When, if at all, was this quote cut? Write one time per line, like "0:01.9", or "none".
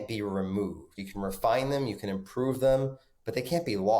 0:00.9